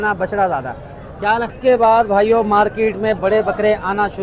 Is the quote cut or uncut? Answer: cut